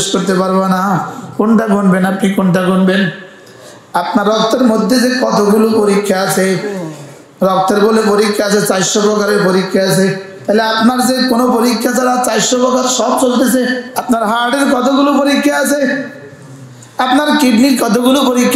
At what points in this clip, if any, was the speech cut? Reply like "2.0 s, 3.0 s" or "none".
1.2 s, 10.3 s, 13.9 s